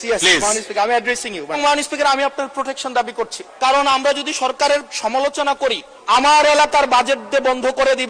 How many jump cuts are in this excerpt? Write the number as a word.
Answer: three